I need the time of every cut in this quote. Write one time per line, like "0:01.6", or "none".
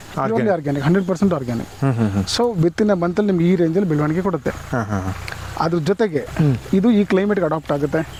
none